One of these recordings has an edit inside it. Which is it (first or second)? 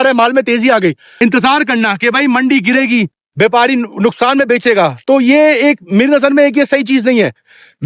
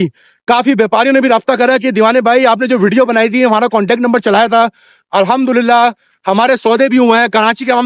first